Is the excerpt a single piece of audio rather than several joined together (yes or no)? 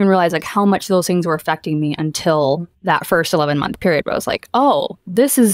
no